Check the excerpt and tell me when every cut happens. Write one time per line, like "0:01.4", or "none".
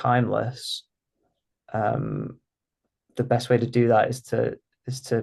none